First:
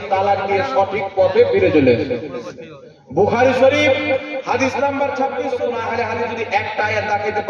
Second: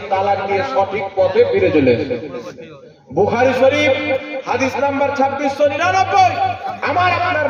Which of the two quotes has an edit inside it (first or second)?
first